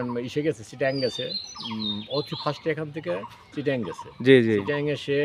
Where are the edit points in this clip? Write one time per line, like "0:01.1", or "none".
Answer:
none